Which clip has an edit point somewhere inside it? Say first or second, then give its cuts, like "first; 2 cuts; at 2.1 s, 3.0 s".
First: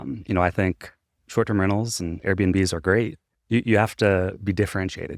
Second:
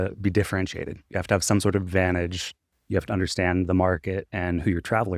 first; 1 cut; at 3.3 s